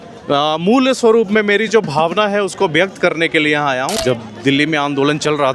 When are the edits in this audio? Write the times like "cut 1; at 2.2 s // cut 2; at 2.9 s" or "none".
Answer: cut 1; at 4.0 s